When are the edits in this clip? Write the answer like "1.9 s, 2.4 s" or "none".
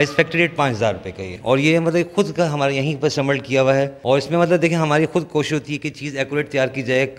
1.3 s, 4.0 s